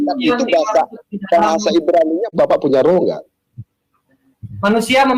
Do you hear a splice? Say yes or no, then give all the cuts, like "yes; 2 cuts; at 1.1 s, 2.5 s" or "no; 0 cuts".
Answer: yes; 1 cut; at 2.4 s